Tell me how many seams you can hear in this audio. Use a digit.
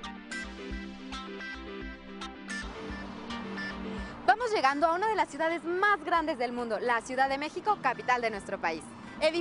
0